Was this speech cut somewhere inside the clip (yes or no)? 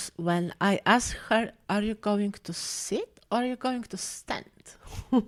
no